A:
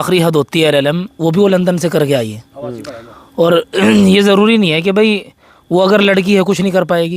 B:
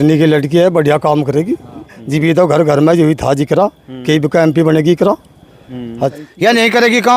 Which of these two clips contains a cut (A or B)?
B